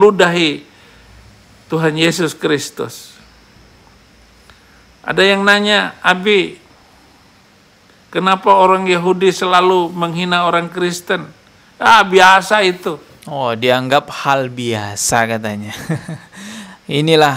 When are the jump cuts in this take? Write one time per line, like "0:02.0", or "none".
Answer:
none